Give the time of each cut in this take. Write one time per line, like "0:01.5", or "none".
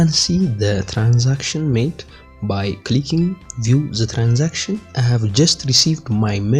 0:04.9